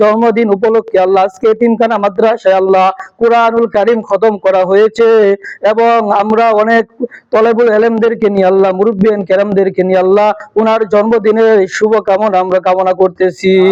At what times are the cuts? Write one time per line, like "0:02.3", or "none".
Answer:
none